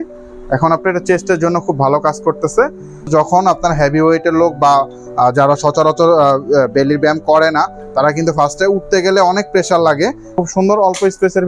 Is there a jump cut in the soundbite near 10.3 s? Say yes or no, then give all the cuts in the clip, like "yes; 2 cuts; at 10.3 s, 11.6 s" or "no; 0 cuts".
yes; 2 cuts; at 3.1 s, 10.3 s